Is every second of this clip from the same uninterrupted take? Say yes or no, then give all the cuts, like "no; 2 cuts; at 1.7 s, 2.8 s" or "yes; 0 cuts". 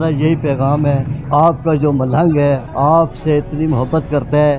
no; 2 cuts; at 1.2 s, 2.7 s